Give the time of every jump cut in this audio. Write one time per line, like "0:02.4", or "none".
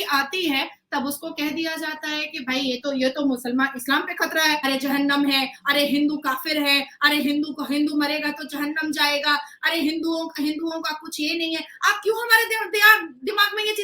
0:04.6